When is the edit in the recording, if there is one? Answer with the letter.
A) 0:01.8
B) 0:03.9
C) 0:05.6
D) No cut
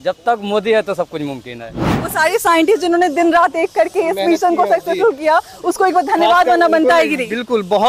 A